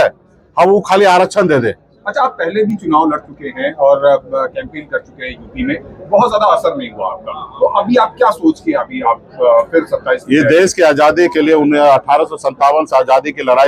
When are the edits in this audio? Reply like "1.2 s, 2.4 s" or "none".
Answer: none